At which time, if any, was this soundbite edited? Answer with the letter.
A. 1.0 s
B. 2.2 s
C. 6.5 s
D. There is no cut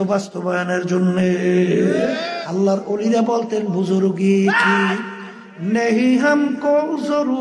B